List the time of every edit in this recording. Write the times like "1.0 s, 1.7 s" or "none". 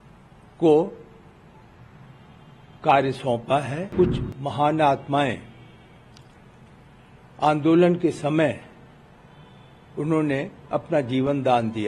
3.9 s